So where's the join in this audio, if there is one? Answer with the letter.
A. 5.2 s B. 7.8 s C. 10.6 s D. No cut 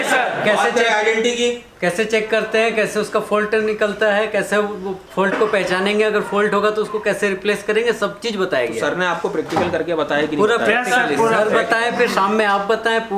D